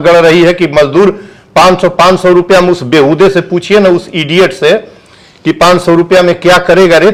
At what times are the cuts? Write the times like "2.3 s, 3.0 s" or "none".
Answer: none